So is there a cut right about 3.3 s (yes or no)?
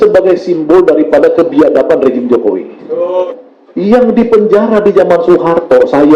yes